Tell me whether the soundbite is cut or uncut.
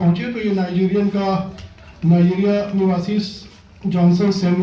uncut